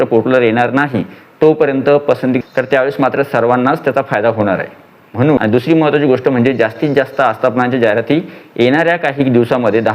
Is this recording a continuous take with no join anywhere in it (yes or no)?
no